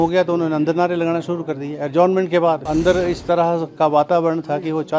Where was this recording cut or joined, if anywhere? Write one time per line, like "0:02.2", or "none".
0:02.6